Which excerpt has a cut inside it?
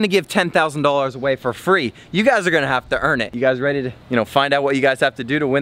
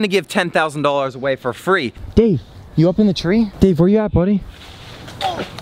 second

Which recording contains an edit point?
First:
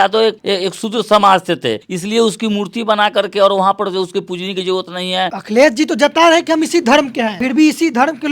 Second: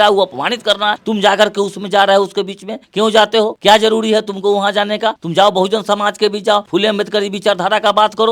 first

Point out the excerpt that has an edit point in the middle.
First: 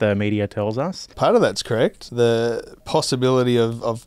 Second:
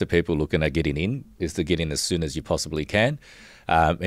first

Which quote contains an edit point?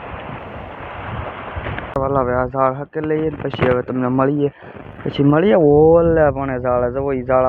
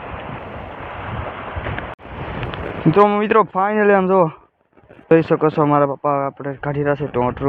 first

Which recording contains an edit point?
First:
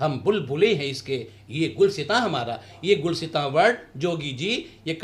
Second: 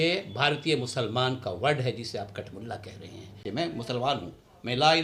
second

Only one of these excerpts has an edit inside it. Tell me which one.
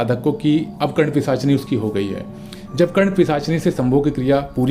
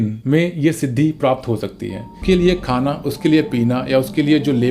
second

